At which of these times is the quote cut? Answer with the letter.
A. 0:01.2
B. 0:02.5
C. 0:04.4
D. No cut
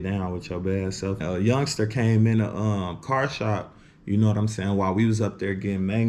A